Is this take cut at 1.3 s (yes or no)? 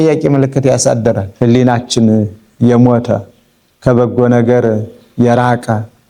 yes